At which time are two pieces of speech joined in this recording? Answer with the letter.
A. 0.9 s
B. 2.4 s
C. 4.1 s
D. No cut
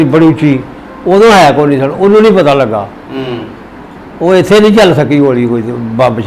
D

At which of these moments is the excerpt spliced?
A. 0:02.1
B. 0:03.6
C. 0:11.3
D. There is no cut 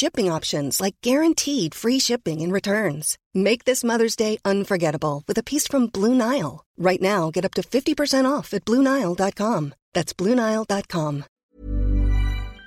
C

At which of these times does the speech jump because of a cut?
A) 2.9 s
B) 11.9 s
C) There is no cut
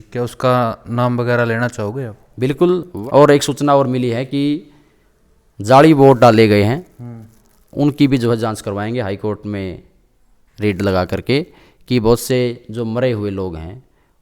A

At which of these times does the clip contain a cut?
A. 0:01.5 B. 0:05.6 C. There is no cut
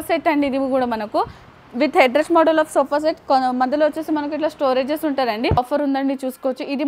B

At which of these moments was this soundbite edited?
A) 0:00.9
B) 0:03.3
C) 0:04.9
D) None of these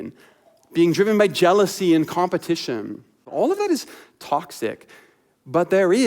B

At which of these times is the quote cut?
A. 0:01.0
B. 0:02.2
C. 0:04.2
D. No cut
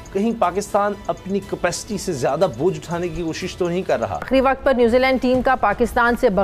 C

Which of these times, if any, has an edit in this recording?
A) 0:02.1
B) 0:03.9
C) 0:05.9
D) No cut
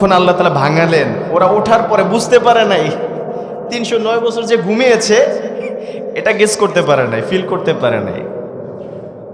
D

